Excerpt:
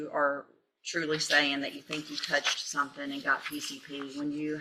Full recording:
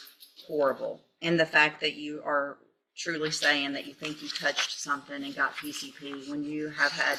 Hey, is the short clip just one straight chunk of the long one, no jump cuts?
yes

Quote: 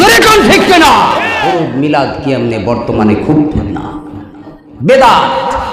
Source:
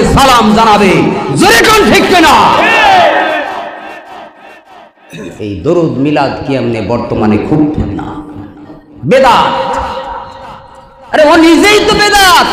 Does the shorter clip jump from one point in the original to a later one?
yes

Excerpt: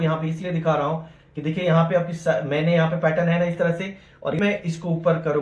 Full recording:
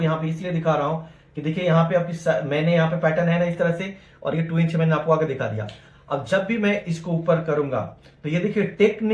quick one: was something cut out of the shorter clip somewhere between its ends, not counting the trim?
yes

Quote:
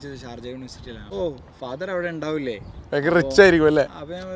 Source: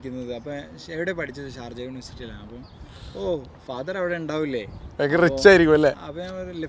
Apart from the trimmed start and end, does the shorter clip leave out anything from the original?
yes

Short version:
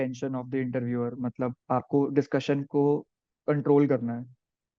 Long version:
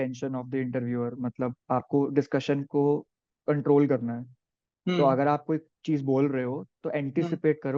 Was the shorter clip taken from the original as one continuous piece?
yes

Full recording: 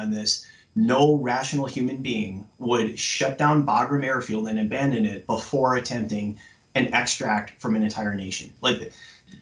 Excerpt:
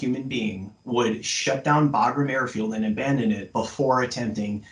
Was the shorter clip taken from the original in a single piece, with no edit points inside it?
yes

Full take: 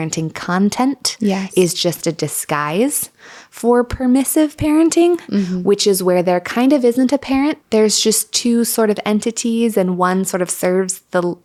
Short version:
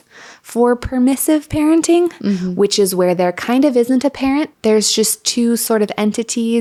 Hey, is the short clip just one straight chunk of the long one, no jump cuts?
yes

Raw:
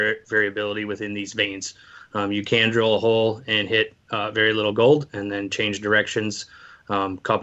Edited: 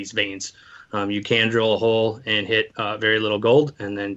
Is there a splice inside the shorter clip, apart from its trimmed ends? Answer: yes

